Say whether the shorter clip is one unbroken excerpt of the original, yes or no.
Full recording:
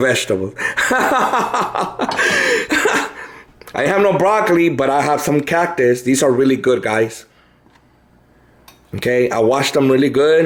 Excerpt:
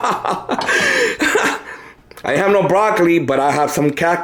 yes